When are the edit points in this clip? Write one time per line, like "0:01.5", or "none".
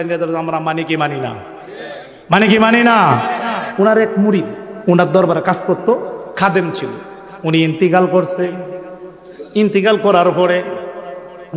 0:03.6
0:04.6